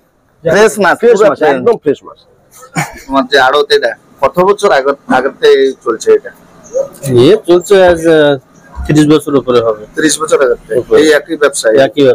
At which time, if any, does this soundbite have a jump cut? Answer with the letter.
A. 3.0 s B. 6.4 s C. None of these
A